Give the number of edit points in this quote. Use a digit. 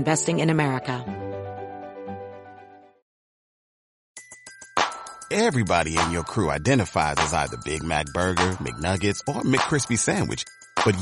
1